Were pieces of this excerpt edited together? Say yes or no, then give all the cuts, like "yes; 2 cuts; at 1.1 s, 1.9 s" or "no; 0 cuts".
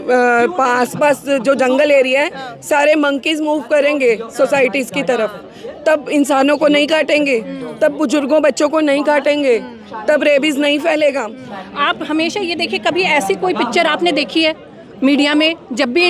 yes; 1 cut; at 11.5 s